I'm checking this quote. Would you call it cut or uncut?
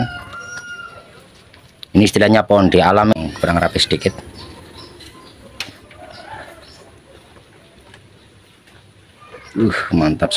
cut